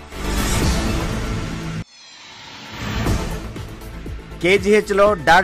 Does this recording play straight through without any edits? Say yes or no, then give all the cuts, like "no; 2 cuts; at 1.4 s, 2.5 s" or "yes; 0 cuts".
no; 2 cuts; at 1.5 s, 4.0 s